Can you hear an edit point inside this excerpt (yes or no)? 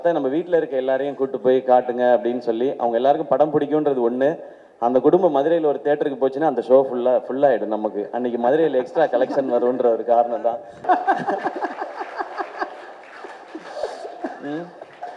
yes